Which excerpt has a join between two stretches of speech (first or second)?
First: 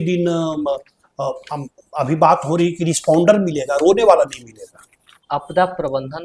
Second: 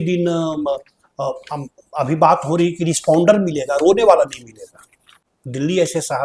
first